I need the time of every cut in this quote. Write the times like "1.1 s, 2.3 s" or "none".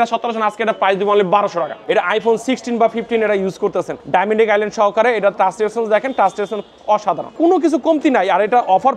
1.8 s, 4.0 s, 7.3 s